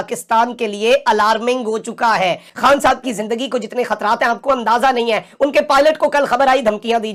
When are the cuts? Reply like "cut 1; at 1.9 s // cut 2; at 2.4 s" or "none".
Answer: none